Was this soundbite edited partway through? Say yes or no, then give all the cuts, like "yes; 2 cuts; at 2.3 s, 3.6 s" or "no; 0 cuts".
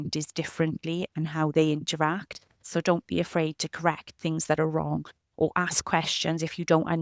yes; 1 cut; at 2.5 s